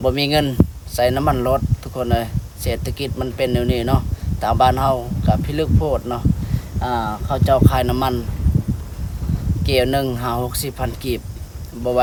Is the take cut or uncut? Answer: uncut